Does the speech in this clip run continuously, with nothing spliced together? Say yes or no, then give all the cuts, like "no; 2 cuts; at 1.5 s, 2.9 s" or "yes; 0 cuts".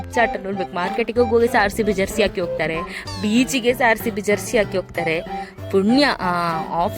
yes; 0 cuts